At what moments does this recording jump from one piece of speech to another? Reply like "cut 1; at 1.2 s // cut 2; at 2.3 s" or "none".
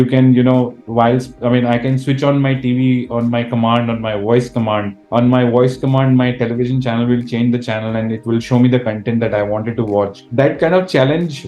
cut 1; at 10.2 s